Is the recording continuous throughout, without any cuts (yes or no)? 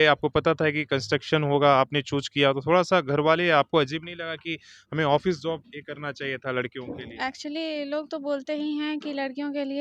yes